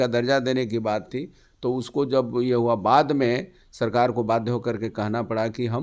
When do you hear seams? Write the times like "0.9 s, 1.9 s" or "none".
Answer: none

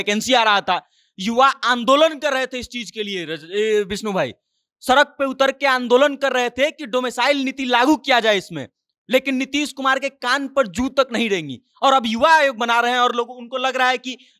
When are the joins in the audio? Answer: none

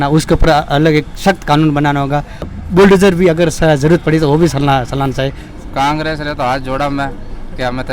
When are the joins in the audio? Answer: 2.5 s, 5.4 s

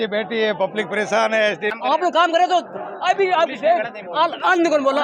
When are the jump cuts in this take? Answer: 1.9 s

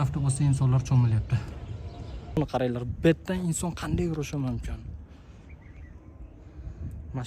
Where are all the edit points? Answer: 2.4 s

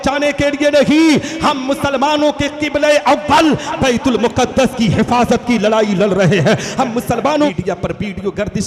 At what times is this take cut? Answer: 7.5 s

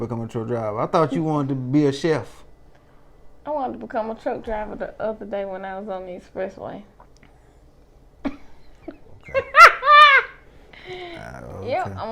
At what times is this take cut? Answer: 9.1 s

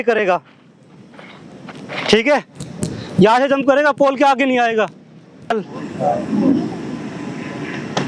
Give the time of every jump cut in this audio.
5.5 s

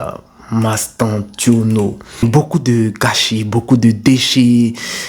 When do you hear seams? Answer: 2.2 s

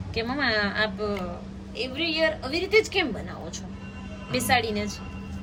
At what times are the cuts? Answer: none

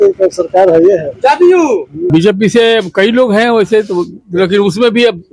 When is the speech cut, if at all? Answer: 2.1 s

